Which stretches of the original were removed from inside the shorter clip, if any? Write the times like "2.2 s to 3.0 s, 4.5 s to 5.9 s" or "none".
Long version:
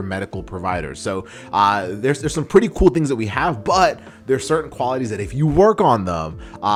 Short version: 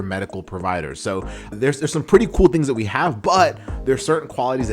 1.5 s to 1.9 s